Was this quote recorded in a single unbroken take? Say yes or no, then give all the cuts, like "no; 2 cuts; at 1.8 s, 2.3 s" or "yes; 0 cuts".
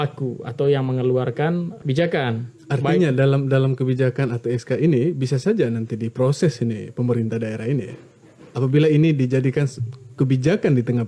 no; 1 cut; at 1.8 s